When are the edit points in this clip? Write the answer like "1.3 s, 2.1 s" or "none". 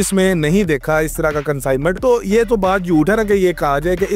2.0 s

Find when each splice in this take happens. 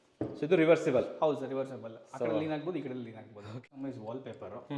3.6 s

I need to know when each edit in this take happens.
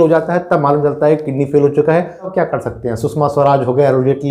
2.3 s

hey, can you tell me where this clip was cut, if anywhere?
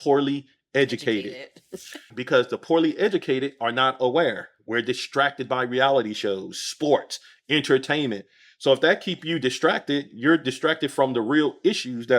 2.1 s

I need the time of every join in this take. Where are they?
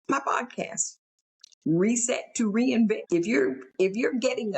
3.0 s

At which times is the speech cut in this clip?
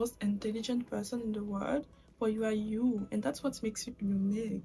none

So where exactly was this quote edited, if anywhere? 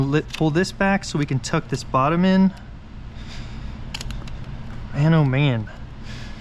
none

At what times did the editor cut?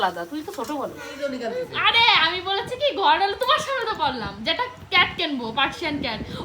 1.1 s

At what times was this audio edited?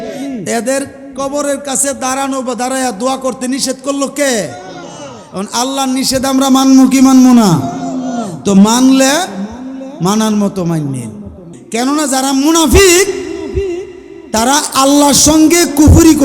11.6 s

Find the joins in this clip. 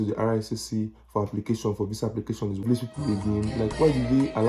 2.6 s

